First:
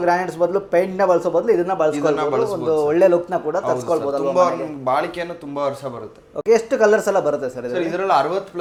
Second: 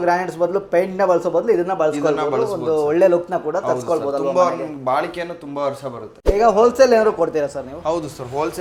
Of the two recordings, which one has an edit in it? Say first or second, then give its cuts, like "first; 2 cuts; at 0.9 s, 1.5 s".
second; 1 cut; at 6.3 s